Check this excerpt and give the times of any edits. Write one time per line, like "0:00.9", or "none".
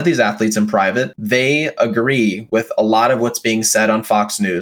0:01.2